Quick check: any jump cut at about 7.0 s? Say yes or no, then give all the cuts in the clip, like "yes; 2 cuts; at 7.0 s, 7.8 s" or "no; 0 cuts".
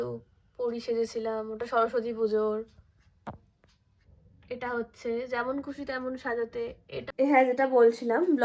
yes; 1 cut; at 7.0 s